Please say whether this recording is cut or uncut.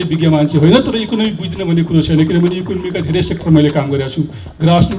uncut